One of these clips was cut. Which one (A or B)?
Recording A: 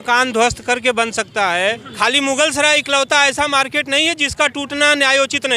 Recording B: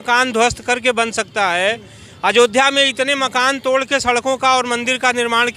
A